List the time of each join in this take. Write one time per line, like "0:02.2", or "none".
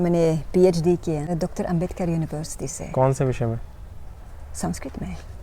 0:01.3